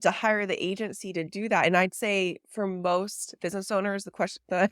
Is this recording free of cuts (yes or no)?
no